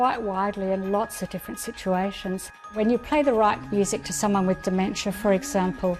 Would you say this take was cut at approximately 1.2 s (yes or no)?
no